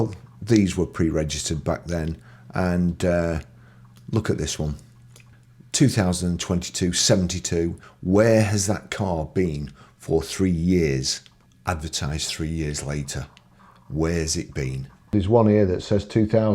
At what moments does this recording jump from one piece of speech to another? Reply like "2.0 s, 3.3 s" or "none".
15.1 s